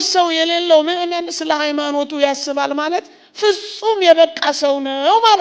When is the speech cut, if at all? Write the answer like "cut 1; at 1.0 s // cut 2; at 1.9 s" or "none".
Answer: none